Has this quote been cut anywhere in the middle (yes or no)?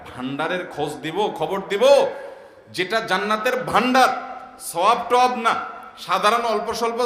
no